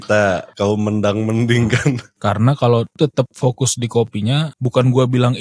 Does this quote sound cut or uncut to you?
cut